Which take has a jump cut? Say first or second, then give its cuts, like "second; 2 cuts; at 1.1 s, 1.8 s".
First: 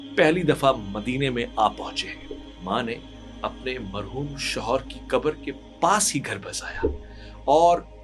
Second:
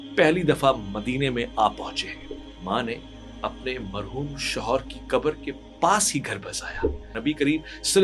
second; 1 cut; at 7.1 s